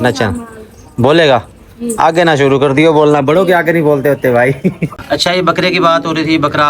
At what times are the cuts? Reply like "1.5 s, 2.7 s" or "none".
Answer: 4.8 s